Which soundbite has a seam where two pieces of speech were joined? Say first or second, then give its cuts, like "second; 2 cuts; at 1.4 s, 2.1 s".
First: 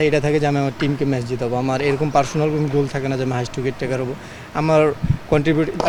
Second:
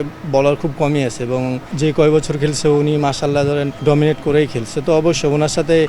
second; 2 cuts; at 1.7 s, 3.7 s